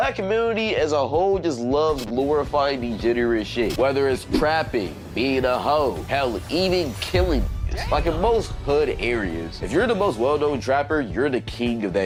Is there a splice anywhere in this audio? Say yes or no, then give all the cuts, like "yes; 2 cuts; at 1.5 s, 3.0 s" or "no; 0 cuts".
no; 0 cuts